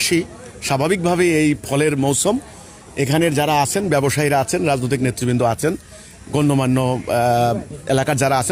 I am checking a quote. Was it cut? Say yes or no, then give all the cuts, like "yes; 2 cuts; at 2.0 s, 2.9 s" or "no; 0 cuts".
no; 0 cuts